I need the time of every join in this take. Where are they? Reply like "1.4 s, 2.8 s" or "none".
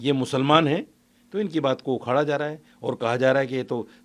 none

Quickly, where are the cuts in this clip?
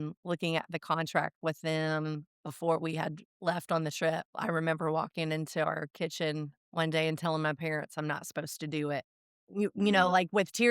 none

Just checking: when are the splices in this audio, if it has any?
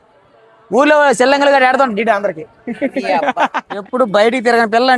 3.8 s

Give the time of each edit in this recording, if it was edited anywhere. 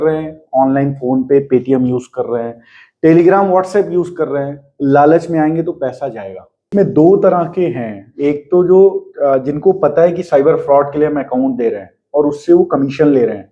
6.7 s

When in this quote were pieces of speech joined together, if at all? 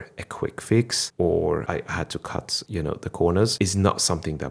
1.0 s, 1.6 s, 2.6 s, 3.5 s

